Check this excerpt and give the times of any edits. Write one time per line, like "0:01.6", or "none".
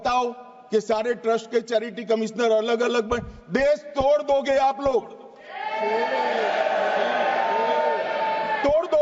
none

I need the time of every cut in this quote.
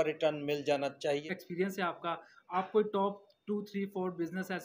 0:01.2

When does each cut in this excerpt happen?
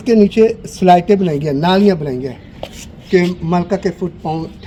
none

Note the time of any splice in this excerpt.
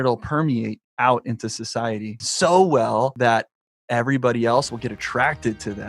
0:00.9
0:02.2
0:03.1
0:04.7

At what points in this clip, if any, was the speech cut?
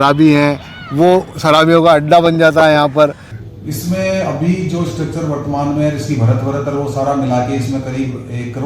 0:03.3

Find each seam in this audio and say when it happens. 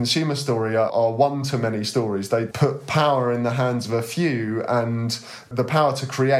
0:00.9
0:02.5
0:05.5

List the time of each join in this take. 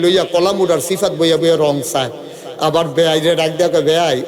none

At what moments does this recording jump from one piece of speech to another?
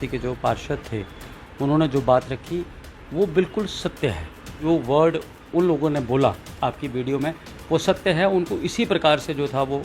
0:04.6

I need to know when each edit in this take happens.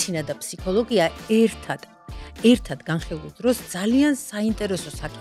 none

